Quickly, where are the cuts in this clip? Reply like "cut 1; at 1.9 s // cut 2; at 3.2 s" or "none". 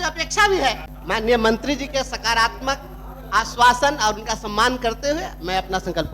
cut 1; at 0.9 s